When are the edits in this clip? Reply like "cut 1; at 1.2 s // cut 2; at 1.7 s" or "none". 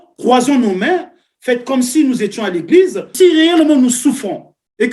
cut 1; at 3.1 s

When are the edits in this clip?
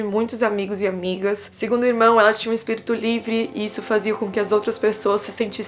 none

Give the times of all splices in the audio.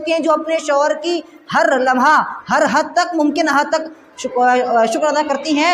none

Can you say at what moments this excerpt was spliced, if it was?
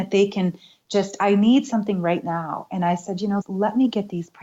cut 1; at 3.4 s

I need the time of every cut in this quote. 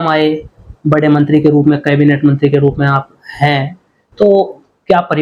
none

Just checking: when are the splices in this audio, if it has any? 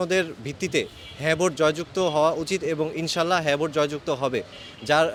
none

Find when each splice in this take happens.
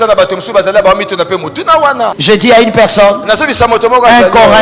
cut 1; at 2.2 s

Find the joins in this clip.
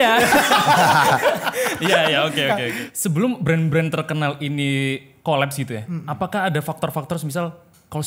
cut 1; at 2.8 s

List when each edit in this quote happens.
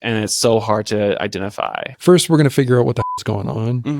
cut 1; at 1.9 s

